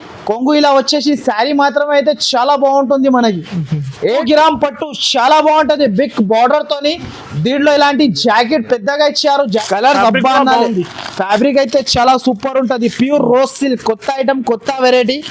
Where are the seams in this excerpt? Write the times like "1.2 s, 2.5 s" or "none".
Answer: 3.9 s, 9.5 s